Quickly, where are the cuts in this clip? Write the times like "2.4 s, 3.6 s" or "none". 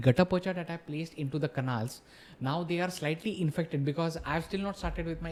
none

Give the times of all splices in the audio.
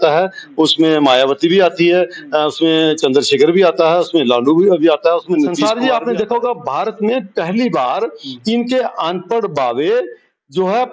5.6 s

